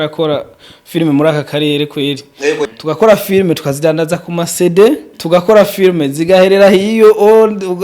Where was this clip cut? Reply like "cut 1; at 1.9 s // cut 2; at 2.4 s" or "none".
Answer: cut 1; at 2.7 s // cut 2; at 5.1 s